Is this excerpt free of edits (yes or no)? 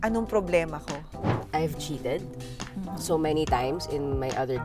no